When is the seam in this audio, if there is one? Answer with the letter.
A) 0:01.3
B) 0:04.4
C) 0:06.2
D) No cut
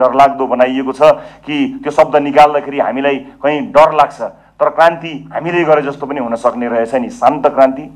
D